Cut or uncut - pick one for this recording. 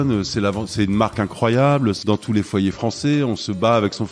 cut